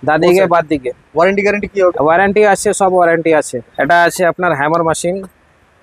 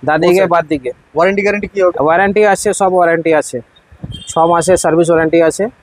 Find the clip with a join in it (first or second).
first